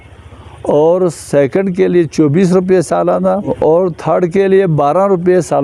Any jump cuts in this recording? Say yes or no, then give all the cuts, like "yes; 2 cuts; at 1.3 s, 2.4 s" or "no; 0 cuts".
yes; 1 cut; at 3.5 s